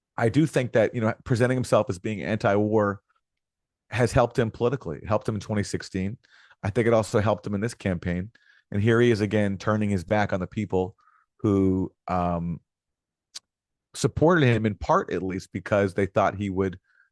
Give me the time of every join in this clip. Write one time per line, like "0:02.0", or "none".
none